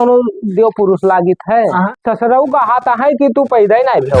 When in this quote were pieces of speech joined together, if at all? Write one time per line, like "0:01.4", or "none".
0:02.0